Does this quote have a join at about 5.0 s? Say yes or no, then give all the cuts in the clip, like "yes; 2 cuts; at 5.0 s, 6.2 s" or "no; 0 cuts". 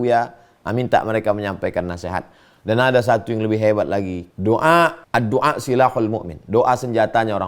yes; 2 cuts; at 4.2 s, 5.0 s